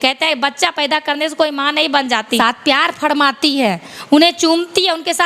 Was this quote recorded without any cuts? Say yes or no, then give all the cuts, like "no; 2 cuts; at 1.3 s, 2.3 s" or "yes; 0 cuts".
no; 1 cut; at 2.4 s